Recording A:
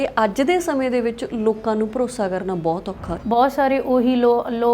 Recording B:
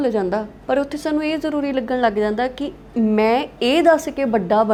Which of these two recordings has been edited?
A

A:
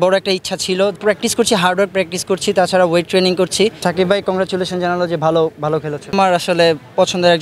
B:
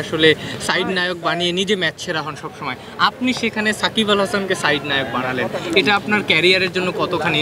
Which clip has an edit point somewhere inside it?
A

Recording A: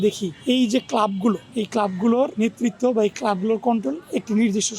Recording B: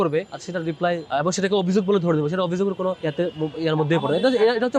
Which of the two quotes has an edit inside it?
B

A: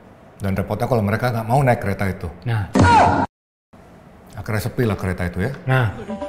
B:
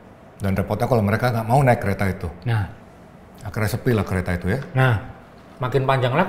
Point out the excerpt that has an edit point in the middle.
B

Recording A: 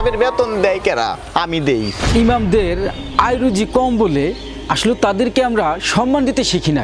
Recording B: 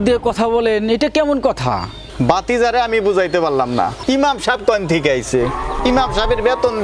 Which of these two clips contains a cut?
A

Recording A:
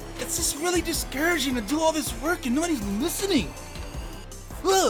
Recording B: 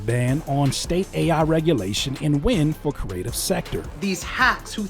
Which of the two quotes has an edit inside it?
B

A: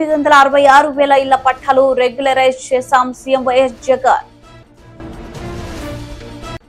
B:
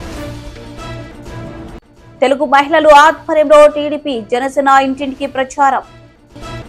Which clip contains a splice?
B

